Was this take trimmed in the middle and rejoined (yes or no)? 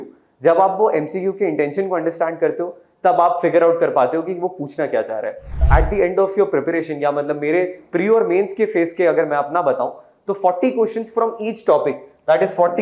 yes